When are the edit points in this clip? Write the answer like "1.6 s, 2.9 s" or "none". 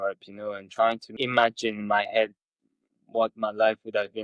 1.1 s

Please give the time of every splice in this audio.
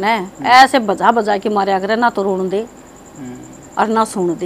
none

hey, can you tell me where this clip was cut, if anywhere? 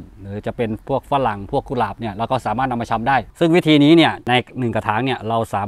3.3 s, 4.2 s

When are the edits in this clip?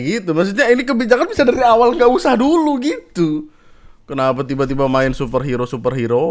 none

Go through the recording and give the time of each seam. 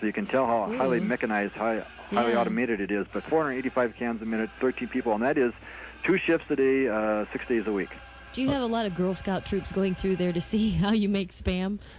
none

